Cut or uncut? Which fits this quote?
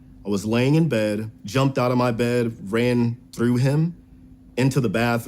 cut